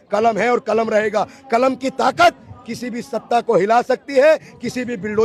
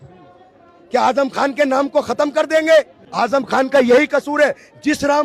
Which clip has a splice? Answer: second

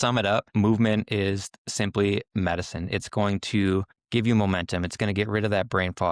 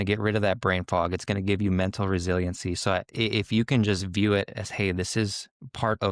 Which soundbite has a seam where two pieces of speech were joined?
first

